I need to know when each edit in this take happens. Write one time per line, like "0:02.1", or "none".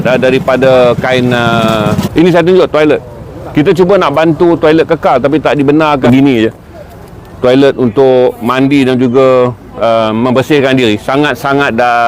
0:02.0
0:06.0